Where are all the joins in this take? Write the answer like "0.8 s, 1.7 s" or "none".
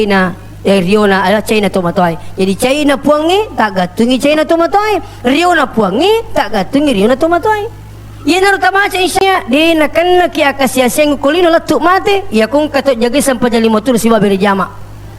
9.2 s

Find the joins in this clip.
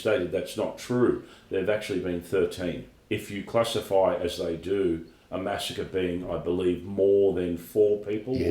2.9 s

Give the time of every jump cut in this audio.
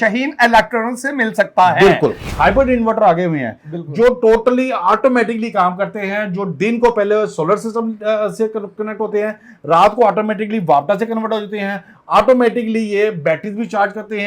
2.2 s

